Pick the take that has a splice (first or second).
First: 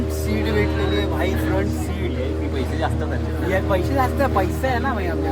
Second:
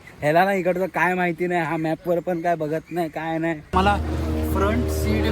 second